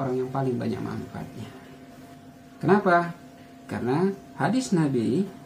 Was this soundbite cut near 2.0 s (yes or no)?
yes